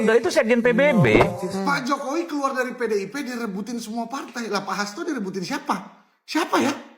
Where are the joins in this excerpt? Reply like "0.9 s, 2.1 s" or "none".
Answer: 1.5 s